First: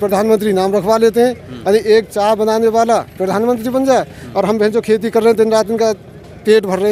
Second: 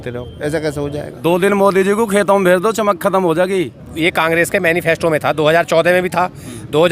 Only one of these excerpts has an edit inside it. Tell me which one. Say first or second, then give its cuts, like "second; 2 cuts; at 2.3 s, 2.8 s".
second; 2 cuts; at 1.1 s, 3.8 s